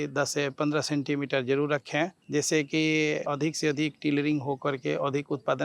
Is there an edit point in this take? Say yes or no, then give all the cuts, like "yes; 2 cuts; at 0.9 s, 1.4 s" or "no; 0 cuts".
yes; 2 cuts; at 2.2 s, 3.3 s